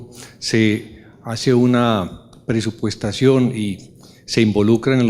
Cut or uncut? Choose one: cut